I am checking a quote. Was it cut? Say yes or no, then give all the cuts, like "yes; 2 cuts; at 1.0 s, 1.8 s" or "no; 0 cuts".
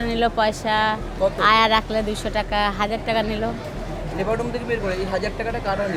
no; 0 cuts